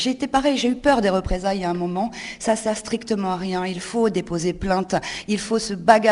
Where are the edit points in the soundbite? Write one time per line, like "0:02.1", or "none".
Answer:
none